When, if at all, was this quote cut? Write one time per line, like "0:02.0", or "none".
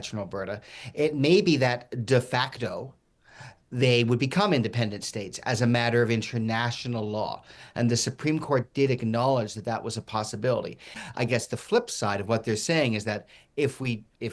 0:10.9